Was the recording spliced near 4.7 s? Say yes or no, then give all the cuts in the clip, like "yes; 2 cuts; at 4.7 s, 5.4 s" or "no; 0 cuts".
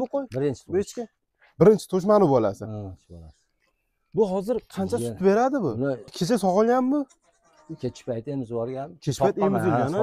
no; 1 cut; at 6.1 s